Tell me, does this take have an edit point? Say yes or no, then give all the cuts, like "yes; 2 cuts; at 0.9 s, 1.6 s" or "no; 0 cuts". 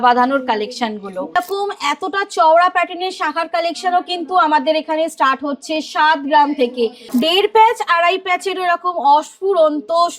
yes; 2 cuts; at 1.4 s, 7.0 s